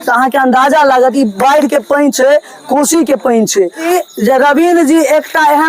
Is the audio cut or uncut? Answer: cut